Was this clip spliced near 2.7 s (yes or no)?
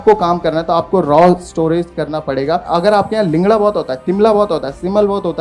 yes